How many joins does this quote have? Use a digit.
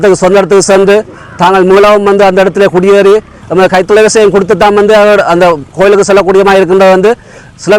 1